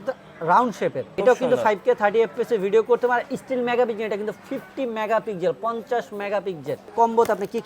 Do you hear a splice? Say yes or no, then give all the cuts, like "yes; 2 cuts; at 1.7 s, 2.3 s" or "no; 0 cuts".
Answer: yes; 2 cuts; at 1.1 s, 6.9 s